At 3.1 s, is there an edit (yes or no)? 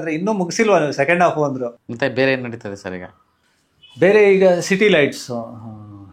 no